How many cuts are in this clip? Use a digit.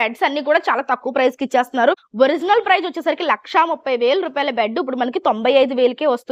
1